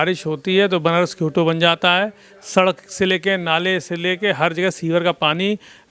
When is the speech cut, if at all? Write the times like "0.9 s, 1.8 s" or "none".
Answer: none

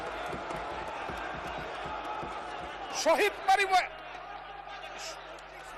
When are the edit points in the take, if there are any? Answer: none

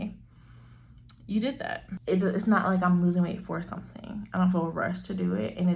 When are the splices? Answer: 1.9 s

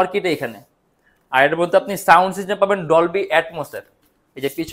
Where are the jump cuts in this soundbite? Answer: none

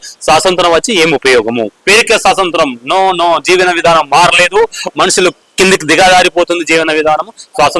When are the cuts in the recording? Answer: 1.8 s

